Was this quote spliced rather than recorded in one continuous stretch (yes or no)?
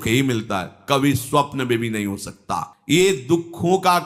no